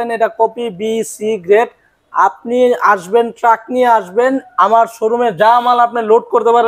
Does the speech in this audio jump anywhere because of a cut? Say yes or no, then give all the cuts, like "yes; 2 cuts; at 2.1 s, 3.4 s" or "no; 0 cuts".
no; 0 cuts